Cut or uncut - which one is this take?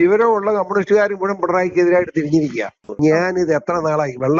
cut